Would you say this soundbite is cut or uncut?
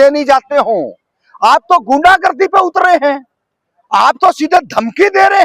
uncut